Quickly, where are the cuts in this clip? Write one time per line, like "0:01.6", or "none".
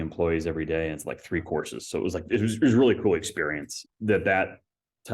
0:03.8